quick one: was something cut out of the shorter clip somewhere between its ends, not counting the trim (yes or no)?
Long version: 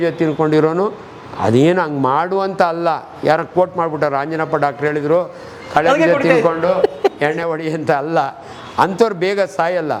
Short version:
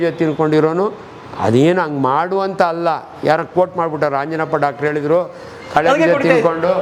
no